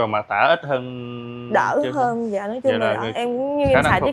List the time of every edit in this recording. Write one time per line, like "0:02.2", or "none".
none